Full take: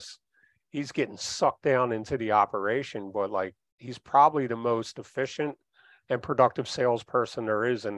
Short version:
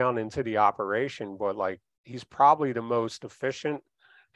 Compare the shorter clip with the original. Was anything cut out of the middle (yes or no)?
no